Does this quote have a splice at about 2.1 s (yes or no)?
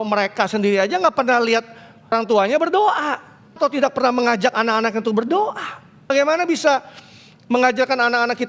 yes